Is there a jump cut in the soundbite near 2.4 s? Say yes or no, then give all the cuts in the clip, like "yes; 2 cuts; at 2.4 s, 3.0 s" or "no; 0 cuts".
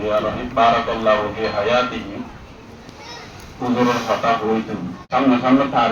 no; 1 cut; at 4.9 s